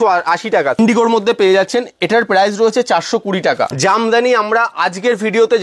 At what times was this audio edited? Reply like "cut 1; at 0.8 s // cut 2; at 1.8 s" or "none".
cut 1; at 0.8 s // cut 2; at 3.7 s